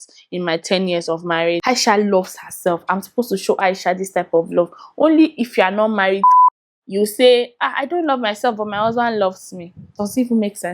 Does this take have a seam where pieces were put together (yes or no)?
yes